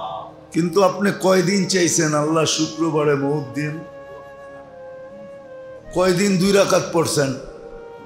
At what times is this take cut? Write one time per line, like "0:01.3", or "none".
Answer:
0:03.8
0:05.9

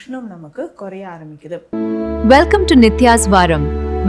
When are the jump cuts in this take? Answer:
0:01.6

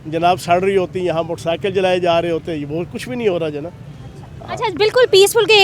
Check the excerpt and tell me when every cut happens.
none

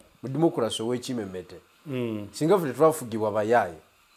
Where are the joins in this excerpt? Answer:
none

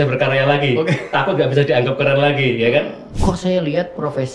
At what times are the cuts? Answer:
0:03.0

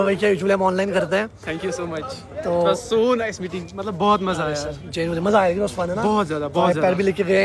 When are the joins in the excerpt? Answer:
none

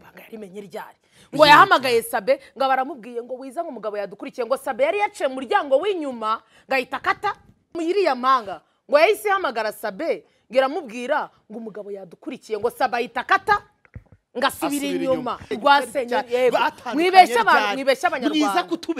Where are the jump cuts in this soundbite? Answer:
0:07.8
0:15.5

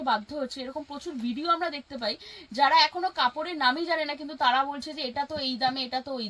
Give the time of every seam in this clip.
none

